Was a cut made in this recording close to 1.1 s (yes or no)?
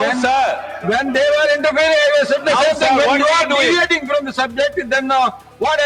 no